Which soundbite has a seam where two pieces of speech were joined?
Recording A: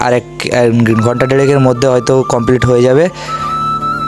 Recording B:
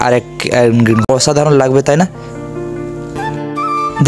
B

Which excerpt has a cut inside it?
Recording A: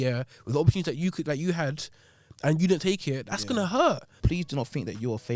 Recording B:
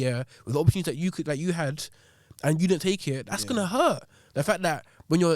A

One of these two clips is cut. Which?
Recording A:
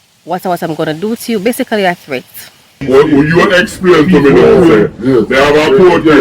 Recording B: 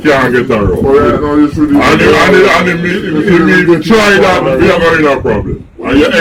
A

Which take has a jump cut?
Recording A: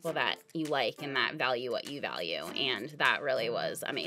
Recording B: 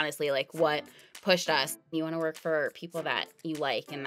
B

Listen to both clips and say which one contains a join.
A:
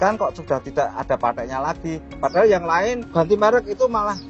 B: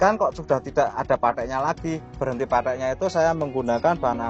B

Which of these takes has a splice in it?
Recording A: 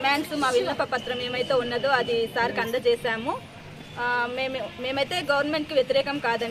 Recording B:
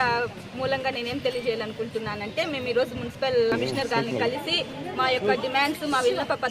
B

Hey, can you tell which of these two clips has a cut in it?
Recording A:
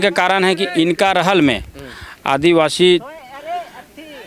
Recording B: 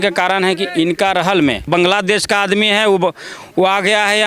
B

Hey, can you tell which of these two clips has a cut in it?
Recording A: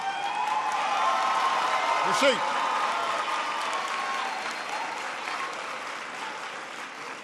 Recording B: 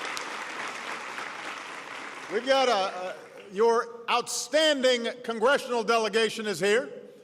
B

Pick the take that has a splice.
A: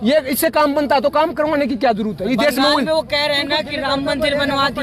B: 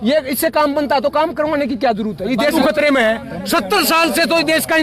B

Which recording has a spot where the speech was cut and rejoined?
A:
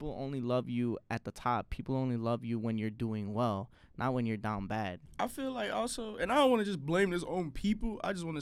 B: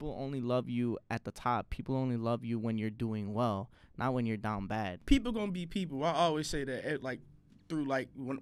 B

